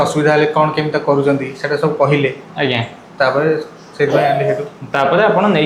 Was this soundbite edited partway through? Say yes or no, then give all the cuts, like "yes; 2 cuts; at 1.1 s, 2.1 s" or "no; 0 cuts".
no; 0 cuts